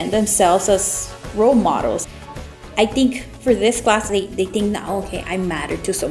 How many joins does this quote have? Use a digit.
2